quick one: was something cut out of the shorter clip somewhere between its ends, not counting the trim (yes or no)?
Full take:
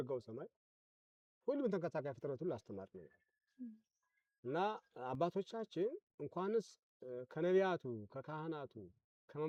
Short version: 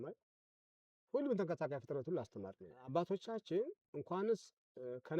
yes